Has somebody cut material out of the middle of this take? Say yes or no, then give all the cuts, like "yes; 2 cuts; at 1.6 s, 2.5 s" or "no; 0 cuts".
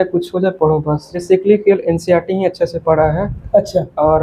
yes; 1 cut; at 1.2 s